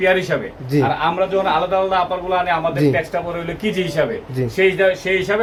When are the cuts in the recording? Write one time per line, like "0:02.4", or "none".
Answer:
none